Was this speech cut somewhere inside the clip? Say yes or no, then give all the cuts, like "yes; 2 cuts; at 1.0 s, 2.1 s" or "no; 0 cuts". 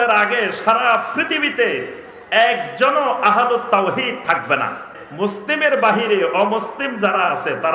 yes; 1 cut; at 5.0 s